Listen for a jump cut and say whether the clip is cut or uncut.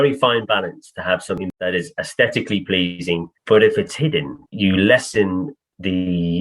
cut